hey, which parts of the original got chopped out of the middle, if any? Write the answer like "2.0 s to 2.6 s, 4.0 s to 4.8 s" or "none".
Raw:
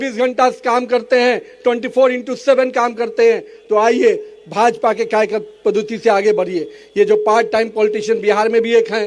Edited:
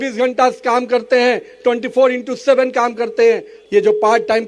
3.5 s to 6.8 s